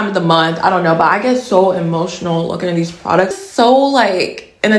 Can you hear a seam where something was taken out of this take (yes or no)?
yes